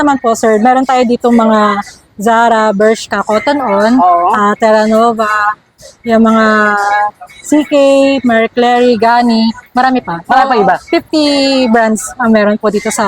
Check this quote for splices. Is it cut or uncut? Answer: uncut